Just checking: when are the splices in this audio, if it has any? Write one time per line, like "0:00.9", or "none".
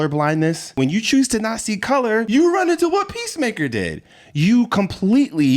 0:00.8
0:02.3